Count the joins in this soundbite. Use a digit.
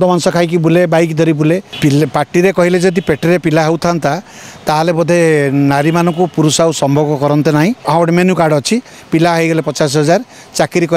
2